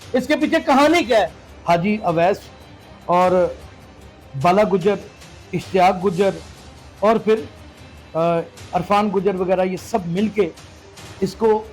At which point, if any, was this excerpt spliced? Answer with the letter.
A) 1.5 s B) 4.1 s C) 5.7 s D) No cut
A